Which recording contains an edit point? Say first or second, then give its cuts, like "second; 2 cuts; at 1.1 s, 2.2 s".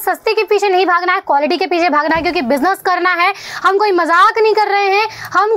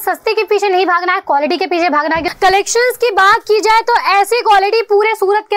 second; 1 cut; at 2.3 s